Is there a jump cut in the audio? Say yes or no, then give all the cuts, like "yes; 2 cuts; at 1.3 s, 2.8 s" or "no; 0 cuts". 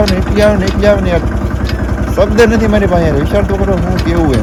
no; 0 cuts